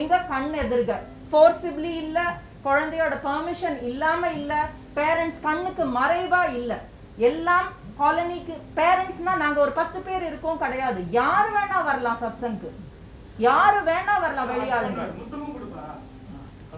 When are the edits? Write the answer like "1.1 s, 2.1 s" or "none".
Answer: none